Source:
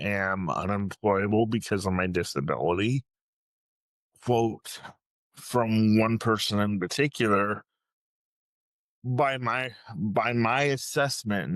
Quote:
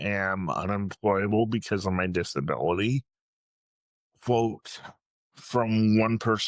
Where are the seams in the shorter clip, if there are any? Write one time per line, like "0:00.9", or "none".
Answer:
none